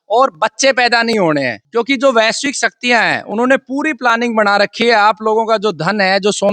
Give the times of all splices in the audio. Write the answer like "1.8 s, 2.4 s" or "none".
1.6 s